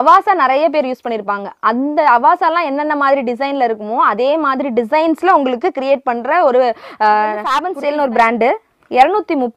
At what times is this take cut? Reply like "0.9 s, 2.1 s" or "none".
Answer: 7.6 s